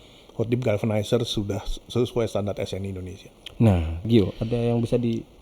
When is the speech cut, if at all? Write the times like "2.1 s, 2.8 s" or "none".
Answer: 4.1 s